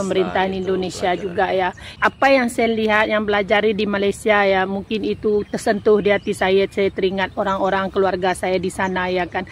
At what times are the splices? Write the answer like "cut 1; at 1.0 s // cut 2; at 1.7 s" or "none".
cut 1; at 1.9 s